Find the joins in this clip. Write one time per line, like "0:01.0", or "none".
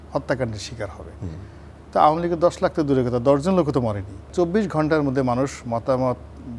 0:04.3